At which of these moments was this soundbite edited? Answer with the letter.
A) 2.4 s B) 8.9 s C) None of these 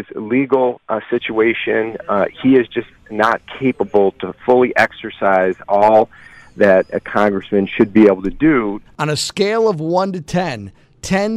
B